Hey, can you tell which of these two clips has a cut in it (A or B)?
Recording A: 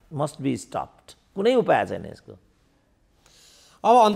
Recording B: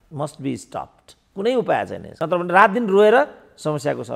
B